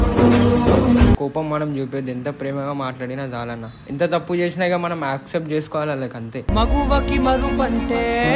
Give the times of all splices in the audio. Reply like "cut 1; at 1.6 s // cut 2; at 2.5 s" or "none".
cut 1; at 1.2 s

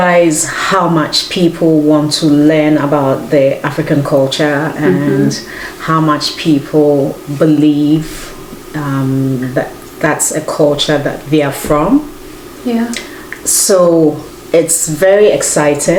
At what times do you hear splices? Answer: none

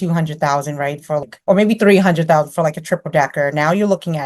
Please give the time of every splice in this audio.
cut 1; at 1.2 s

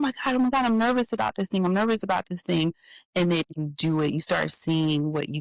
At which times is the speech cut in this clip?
none

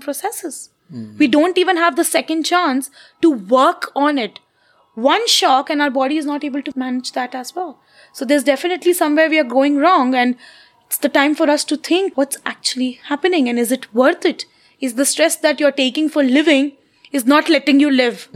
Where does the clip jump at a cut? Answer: cut 1; at 6.7 s // cut 2; at 12.1 s

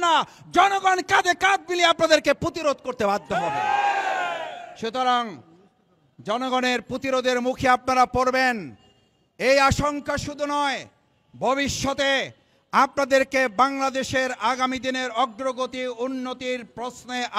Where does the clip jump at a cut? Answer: none

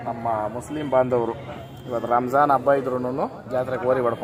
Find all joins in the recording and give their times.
none

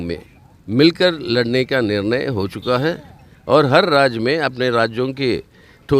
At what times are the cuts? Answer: none

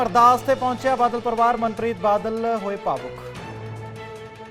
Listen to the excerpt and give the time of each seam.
none

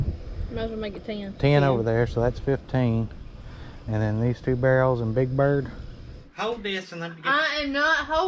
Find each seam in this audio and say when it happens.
cut 1; at 6.2 s

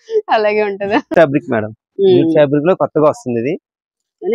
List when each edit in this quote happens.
cut 1; at 1.1 s

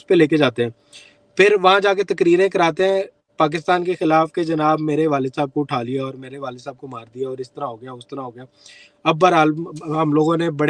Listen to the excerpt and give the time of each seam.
none

